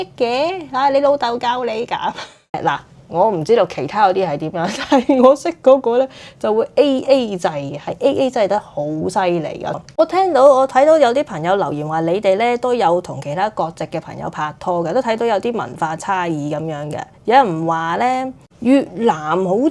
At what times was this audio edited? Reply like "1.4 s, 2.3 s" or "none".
2.6 s, 9.8 s